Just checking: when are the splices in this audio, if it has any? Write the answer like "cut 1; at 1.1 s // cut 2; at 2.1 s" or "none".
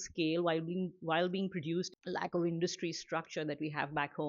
cut 1; at 1.9 s

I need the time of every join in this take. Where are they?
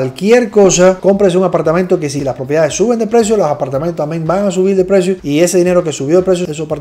cut 1; at 1.0 s // cut 2; at 2.1 s // cut 3; at 5.2 s

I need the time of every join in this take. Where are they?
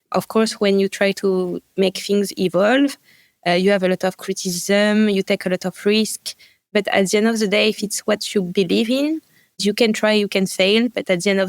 cut 1; at 6.7 s // cut 2; at 9.6 s

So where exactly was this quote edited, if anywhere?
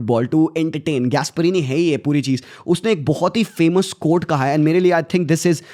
none

